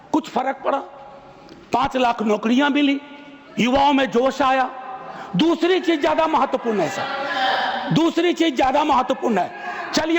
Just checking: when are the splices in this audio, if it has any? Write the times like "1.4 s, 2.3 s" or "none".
none